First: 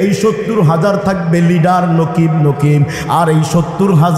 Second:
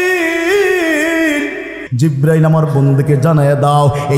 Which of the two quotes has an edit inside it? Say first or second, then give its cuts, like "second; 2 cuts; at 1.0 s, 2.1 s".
second; 1 cut; at 1.9 s